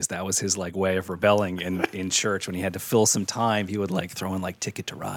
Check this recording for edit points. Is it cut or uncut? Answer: uncut